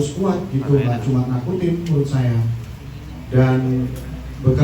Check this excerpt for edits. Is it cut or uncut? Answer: uncut